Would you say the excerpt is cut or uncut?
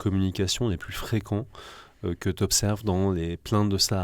uncut